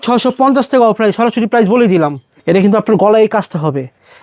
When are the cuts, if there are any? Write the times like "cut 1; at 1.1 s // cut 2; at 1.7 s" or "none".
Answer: cut 1; at 2.3 s